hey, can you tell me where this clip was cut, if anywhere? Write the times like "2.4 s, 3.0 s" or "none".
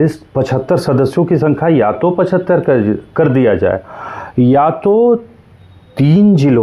none